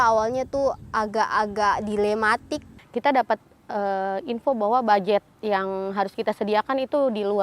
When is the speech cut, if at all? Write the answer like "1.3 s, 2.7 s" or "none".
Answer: 2.8 s